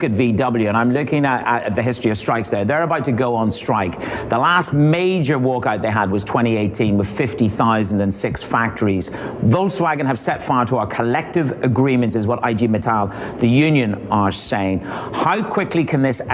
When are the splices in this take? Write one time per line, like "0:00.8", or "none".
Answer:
none